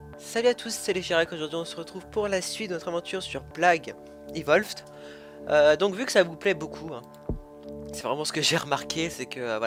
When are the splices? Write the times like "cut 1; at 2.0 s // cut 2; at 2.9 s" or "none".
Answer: none

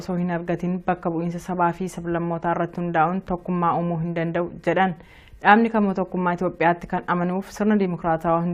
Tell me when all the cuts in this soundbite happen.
cut 1; at 7.2 s

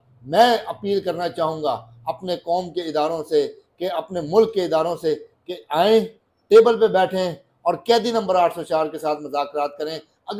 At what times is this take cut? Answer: none

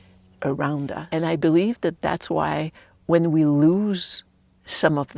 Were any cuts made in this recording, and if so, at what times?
cut 1; at 1.0 s

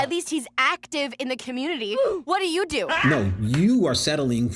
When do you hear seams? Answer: cut 1; at 2.9 s

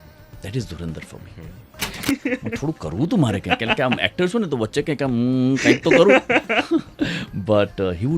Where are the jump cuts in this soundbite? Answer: cut 1; at 2.0 s

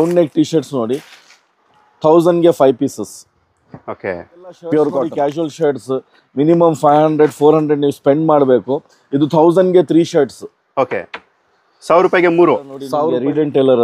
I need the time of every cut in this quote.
cut 1; at 5.1 s // cut 2; at 12.9 s

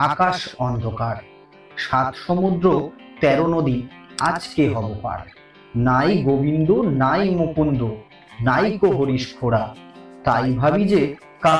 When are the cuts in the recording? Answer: none

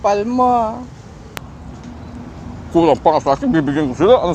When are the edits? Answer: cut 1; at 1.4 s

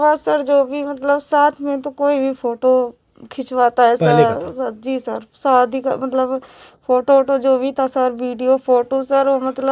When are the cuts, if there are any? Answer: none

